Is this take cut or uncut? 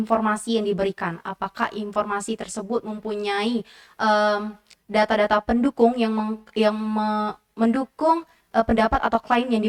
uncut